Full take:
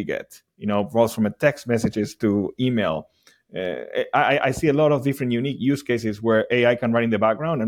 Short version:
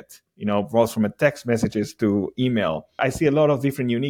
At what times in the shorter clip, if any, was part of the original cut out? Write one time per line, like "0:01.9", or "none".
0:03.0